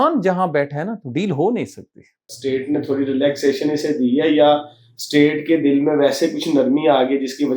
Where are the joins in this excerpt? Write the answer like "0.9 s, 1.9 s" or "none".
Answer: 2.3 s